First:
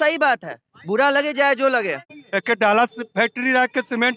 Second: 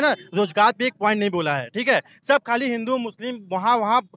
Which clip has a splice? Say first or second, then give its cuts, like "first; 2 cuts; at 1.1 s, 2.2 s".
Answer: first; 1 cut; at 2.2 s